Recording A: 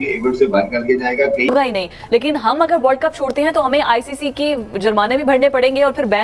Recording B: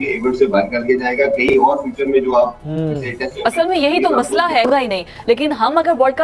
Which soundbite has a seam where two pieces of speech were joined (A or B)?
A